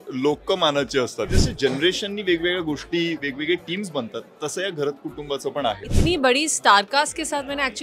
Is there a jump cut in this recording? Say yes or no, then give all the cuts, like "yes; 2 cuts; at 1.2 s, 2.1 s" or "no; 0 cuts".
yes; 2 cuts; at 1.3 s, 5.9 s